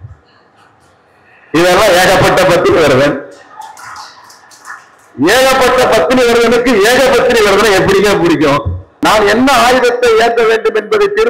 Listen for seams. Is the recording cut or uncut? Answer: cut